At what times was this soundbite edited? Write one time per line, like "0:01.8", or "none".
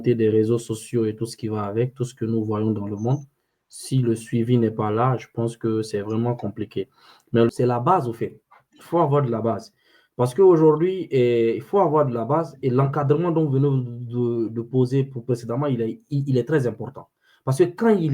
0:07.5